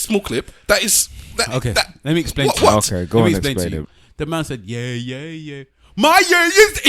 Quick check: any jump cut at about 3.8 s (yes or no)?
yes